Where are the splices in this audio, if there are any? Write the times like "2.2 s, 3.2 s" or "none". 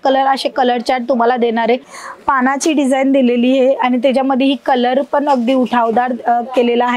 1.9 s